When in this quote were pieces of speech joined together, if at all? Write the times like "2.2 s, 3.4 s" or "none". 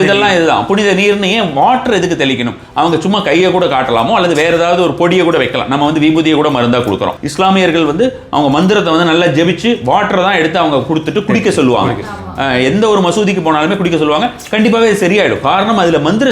7.2 s